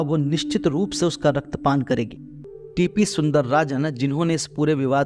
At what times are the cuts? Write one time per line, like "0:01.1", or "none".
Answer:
0:02.5